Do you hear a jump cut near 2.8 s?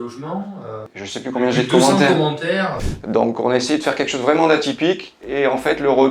yes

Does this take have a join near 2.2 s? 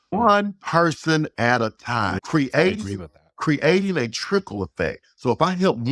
yes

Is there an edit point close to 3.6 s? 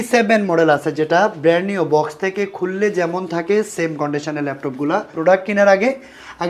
no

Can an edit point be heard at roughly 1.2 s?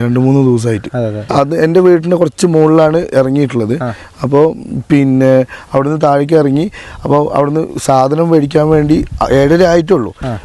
yes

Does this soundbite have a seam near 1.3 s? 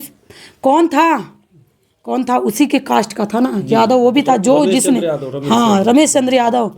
no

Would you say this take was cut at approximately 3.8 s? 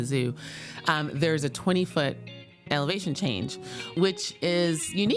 yes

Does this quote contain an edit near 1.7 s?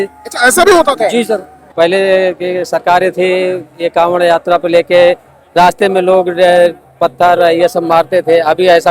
yes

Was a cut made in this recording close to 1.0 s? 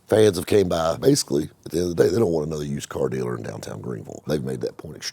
yes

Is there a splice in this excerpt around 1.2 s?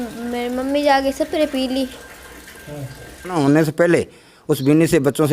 no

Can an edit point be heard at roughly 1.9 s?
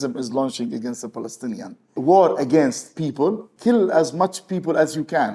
yes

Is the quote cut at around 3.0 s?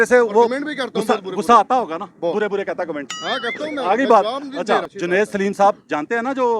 no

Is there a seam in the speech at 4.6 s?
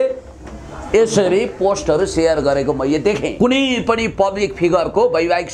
no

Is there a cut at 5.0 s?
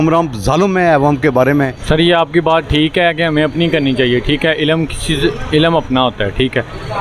no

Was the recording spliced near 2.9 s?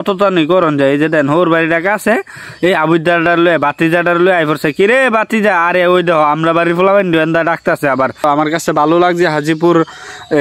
no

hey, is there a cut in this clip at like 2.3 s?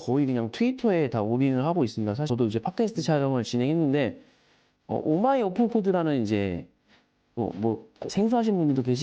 yes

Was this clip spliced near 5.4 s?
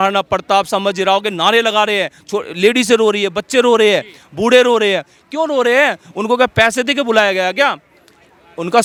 no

